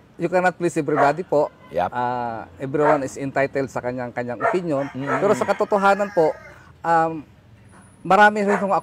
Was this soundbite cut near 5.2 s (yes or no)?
no